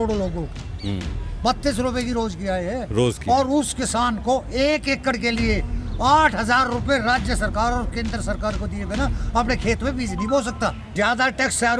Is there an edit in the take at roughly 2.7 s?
no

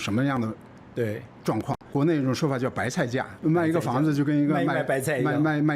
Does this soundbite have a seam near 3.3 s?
yes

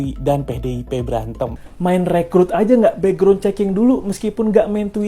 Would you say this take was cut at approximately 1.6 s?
yes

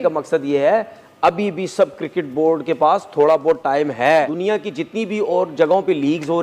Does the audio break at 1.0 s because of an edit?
no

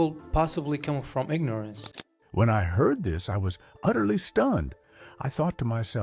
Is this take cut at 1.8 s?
yes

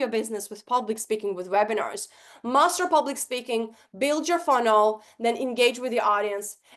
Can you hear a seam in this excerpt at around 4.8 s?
no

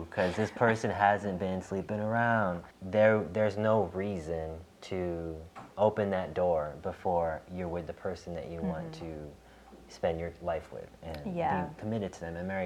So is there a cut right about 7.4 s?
no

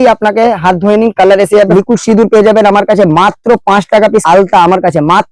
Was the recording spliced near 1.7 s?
yes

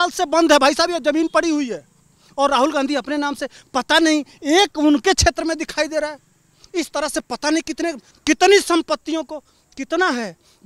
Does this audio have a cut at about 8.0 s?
yes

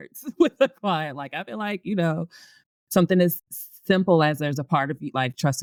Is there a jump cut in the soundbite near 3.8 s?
no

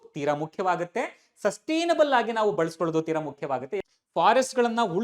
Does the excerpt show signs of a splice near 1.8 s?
no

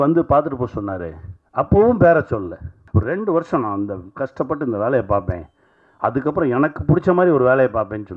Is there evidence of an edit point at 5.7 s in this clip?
no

